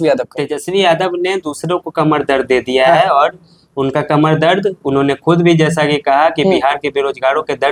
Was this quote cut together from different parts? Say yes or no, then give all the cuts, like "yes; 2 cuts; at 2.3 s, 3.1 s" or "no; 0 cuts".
no; 0 cuts